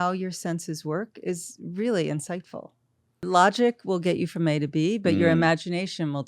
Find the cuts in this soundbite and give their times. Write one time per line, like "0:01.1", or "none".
0:03.2